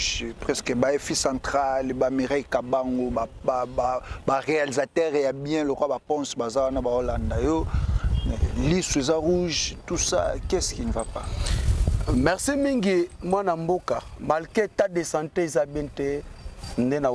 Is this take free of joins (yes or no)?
yes